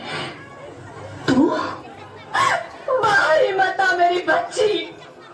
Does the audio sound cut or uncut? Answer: uncut